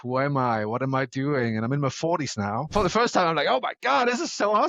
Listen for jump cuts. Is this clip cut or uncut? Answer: cut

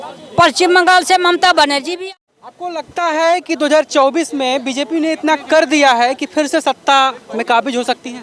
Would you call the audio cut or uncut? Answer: cut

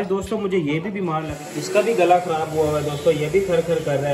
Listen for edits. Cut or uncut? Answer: cut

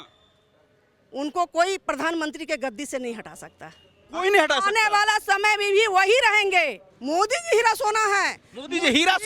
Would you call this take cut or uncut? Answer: cut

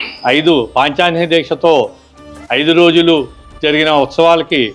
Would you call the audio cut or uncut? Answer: uncut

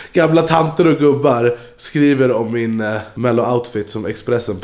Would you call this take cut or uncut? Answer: uncut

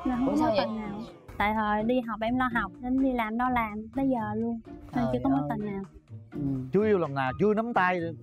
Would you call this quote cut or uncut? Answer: uncut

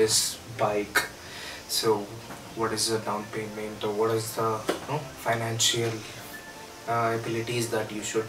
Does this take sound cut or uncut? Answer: uncut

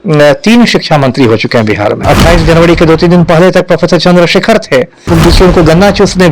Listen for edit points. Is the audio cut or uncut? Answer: cut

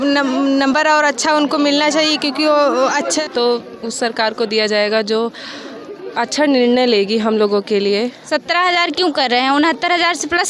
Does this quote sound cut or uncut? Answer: cut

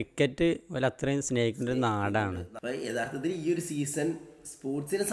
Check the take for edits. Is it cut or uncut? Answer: cut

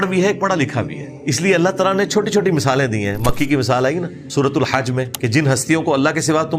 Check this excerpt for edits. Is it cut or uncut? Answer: cut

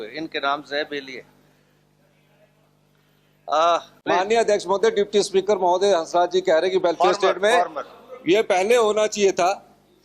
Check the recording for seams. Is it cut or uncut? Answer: cut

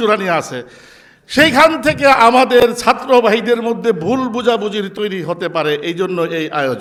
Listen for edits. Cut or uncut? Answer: uncut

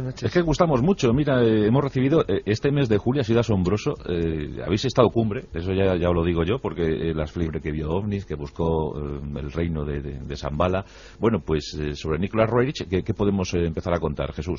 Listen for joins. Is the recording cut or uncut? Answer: uncut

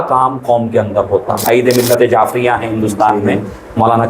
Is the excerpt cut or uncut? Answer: cut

